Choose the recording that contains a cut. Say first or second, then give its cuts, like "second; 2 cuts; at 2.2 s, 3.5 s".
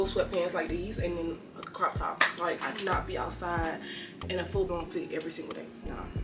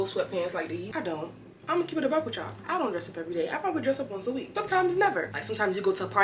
second; 2 cuts; at 0.9 s, 5.3 s